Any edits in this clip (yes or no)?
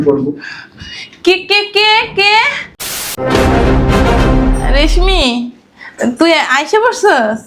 yes